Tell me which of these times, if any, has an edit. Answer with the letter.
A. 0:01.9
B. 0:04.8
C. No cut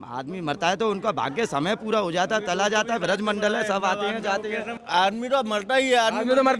B